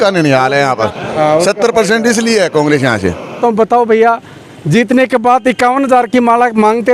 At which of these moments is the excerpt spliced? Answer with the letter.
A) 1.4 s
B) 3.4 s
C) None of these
B